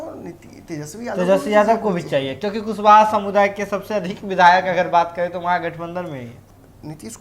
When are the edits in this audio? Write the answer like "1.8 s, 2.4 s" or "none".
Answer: 6.3 s